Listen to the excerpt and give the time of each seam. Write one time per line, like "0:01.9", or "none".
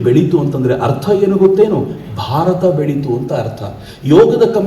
none